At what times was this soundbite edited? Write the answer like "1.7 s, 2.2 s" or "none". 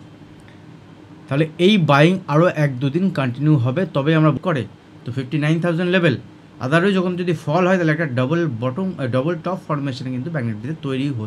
4.4 s